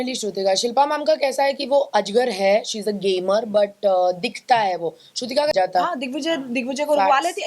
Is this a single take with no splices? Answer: no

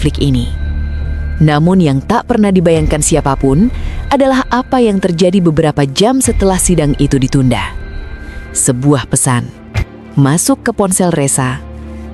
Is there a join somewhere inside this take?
no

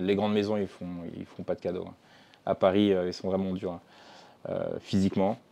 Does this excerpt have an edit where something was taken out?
no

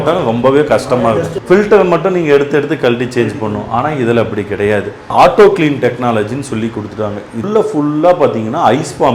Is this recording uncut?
no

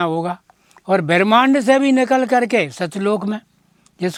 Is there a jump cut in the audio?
no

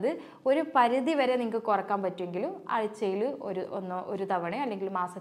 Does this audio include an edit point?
no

